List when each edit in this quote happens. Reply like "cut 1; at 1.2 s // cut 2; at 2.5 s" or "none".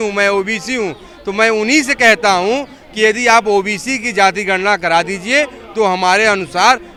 none